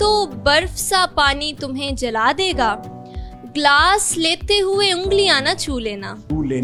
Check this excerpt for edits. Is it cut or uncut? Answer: uncut